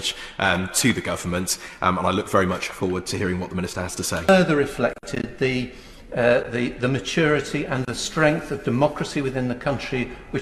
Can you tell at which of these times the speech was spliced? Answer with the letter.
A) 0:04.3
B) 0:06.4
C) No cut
A